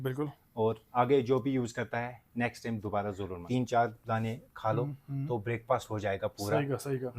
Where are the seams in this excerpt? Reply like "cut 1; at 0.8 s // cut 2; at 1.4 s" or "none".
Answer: cut 1; at 3.4 s